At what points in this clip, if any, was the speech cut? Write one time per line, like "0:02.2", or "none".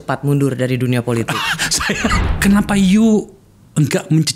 0:02.1